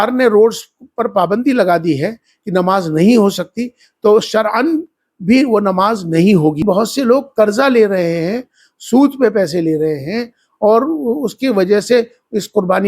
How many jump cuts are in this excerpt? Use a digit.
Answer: 1